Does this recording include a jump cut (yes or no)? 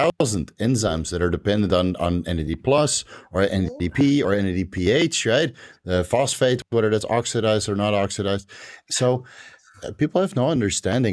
no